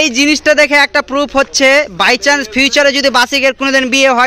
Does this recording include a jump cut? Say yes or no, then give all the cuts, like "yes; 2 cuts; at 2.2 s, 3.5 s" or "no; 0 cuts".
no; 0 cuts